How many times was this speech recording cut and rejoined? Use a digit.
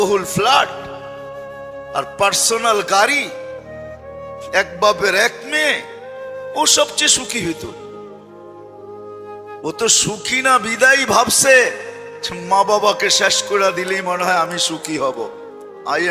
2